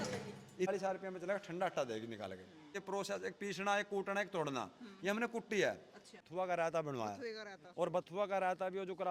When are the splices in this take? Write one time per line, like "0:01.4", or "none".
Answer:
0:00.7
0:02.8
0:06.2